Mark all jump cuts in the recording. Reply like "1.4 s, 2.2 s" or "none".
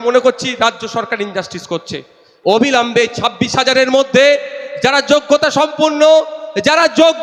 2.2 s